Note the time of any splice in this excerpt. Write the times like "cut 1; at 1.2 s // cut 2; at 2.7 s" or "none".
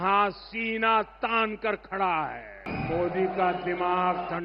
cut 1; at 2.7 s